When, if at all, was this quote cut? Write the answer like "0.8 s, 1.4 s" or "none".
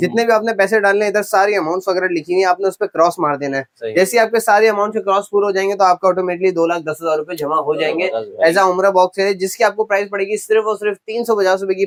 none